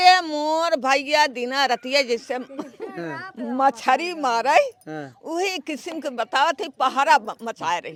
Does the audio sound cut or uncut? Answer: uncut